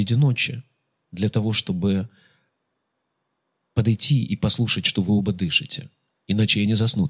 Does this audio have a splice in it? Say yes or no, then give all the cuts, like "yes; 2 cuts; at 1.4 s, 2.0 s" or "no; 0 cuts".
no; 0 cuts